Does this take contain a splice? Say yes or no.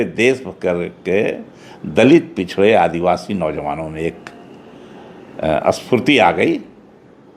no